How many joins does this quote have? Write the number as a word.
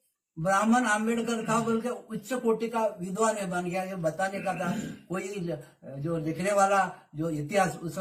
zero